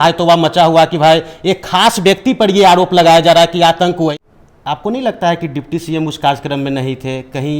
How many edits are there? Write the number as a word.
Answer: one